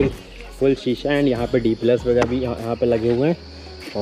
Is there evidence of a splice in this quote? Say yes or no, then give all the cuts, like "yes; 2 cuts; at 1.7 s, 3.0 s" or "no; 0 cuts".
no; 0 cuts